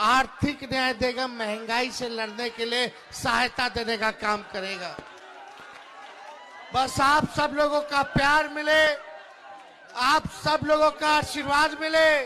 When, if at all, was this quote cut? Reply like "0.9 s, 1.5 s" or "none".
none